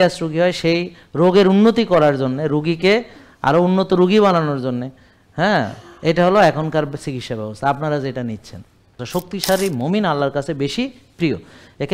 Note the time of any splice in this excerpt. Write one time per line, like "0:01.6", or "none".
0:09.0